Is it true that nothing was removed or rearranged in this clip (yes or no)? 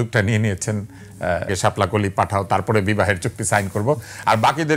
no